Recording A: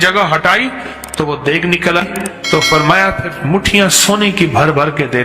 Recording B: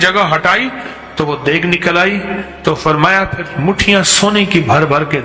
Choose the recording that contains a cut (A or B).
A